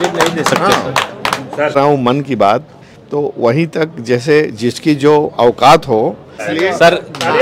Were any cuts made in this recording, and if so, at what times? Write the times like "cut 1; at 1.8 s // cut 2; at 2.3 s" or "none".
cut 1; at 1.8 s // cut 2; at 6.4 s